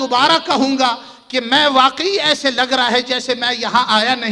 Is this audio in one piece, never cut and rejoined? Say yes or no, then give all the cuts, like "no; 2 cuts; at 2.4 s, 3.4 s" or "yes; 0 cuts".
yes; 0 cuts